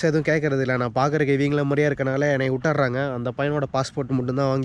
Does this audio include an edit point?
no; 0 cuts

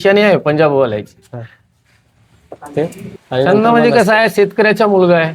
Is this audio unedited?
no; 1 cut; at 2.7 s

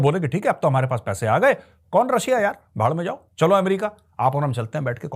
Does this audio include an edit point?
no; 0 cuts

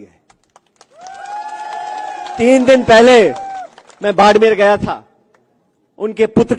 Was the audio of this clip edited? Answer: no; 0 cuts

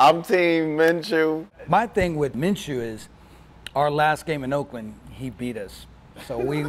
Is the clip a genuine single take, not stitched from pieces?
no; 2 cuts; at 1.5 s, 2.3 s

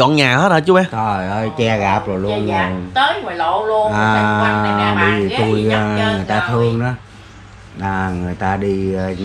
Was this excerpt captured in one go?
yes; 0 cuts

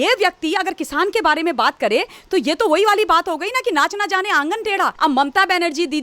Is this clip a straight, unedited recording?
no; 1 cut; at 4.9 s

